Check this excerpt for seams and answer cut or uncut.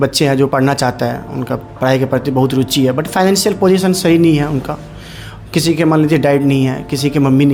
uncut